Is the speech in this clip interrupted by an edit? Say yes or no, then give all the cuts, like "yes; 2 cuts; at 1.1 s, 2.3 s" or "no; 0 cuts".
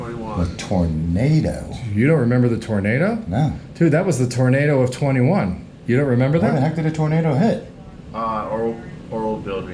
no; 0 cuts